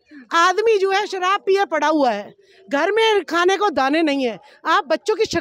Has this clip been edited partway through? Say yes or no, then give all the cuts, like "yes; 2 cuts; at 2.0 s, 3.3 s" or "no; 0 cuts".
no; 0 cuts